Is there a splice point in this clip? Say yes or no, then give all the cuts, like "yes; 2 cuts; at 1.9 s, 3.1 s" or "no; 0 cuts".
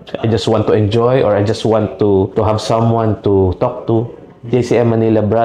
no; 0 cuts